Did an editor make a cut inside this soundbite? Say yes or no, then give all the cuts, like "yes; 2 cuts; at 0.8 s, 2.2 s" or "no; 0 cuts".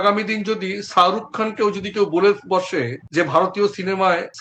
no; 0 cuts